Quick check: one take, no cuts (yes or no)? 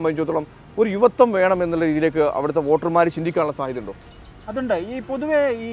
yes